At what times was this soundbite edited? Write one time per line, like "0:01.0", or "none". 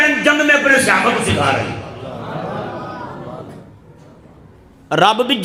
none